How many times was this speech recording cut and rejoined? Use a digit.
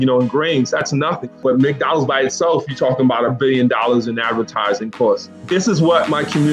2